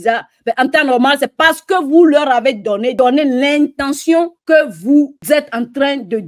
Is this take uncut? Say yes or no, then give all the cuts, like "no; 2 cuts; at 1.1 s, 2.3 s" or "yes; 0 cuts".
no; 3 cuts; at 2.9 s, 4.4 s, 5.2 s